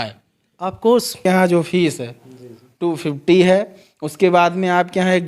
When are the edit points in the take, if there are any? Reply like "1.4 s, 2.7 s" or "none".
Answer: 1.2 s

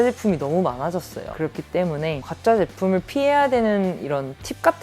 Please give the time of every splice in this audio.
2.2 s

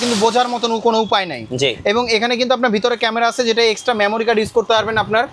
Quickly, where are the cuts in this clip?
none

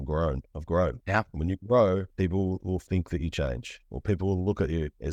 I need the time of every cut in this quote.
none

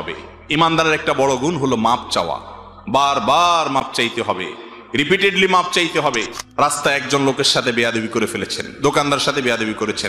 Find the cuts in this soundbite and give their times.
6.4 s

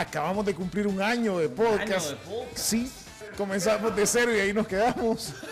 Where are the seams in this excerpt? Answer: 3.1 s

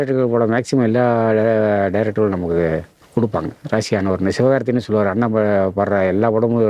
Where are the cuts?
3.0 s

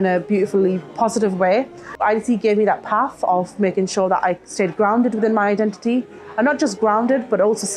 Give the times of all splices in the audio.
1.8 s

